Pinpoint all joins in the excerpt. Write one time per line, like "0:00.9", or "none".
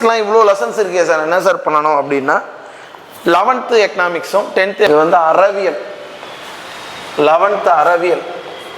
0:04.9